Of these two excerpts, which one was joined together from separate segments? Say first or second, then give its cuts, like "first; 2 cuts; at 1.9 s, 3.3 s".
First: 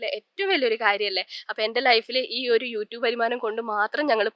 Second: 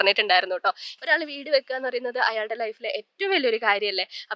second; 1 cut; at 0.9 s